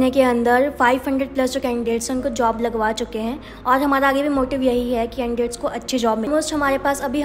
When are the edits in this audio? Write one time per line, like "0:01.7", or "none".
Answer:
0:06.3